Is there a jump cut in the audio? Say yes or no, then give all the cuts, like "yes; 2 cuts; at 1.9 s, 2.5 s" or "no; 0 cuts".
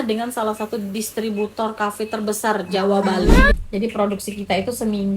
yes; 1 cut; at 3.5 s